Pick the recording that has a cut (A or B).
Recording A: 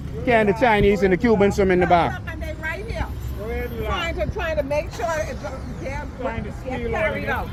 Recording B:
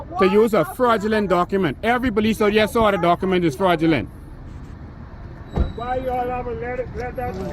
B